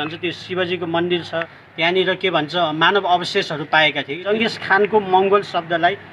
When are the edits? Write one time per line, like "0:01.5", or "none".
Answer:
0:01.6
0:04.3